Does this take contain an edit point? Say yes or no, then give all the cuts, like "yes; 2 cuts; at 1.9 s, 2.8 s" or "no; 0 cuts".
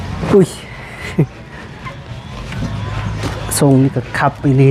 no; 0 cuts